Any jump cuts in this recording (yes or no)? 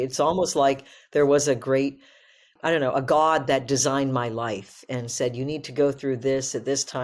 yes